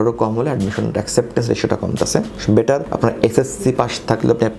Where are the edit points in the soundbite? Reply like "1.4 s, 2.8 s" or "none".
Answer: none